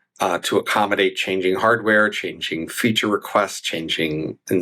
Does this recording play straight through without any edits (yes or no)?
yes